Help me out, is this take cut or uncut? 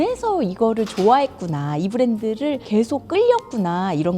cut